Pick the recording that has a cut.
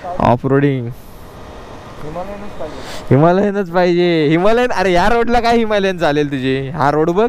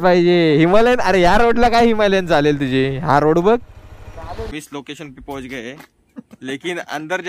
second; 1 cut; at 4.5 s

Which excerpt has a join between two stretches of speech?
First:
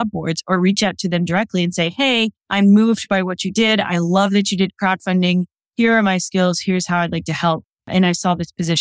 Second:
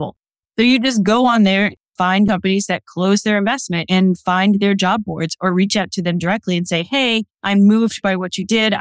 first; 1 cut; at 7.7 s

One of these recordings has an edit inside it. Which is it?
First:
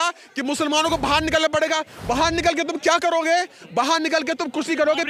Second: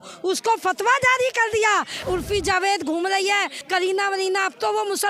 second; 2 cuts; at 1.9 s, 3.6 s

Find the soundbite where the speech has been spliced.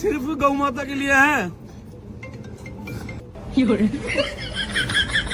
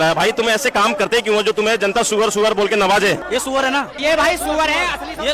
second; 1 cut; at 3.6 s

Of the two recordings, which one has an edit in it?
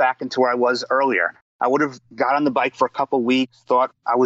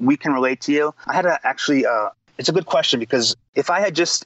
second; 3 cuts; at 1.0 s, 2.3 s, 3.4 s

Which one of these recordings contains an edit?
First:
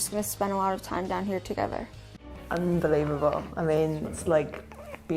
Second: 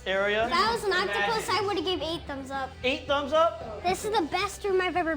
first; 1 cut; at 2.2 s

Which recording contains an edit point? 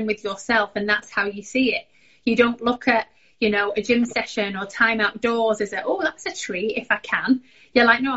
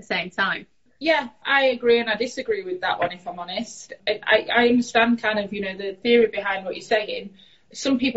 second; 3 cuts; at 1.3 s, 4.0 s, 6.0 s

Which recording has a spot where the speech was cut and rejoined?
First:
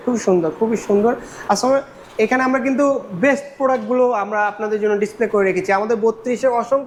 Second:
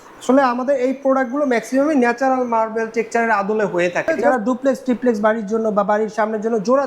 second; 1 cut; at 4.2 s

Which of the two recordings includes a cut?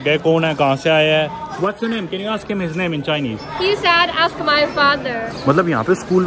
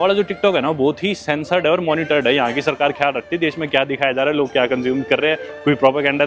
first; 3 cuts; at 1.4 s, 3.4 s, 5.2 s

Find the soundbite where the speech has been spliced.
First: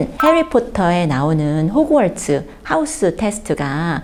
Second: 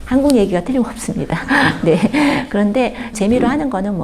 second; 1 cut; at 3.1 s

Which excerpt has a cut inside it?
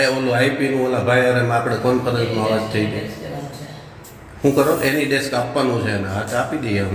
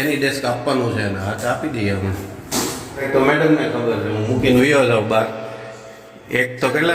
second; 1 cut; at 3.1 s

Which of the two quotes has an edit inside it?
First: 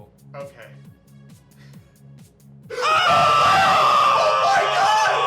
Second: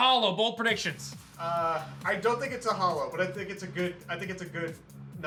first; 1 cut; at 2.8 s

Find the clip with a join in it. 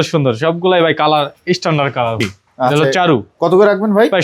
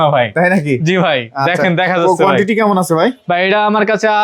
first; 1 cut; at 2.2 s

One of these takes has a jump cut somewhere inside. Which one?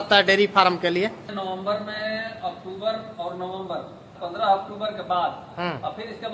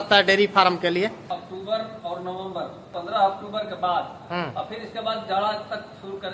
second; 2 cuts; at 1.2 s, 2.8 s

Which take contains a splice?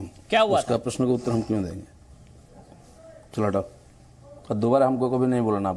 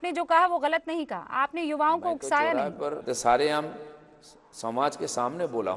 second; 1 cut; at 3.0 s

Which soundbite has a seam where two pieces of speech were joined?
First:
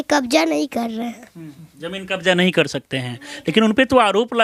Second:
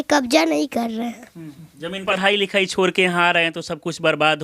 second; 1 cut; at 2.1 s

